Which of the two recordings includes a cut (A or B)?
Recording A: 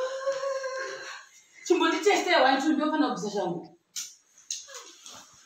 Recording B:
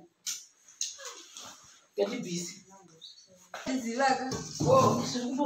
B